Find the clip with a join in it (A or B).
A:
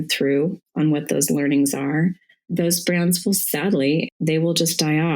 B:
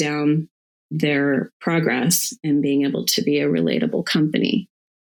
A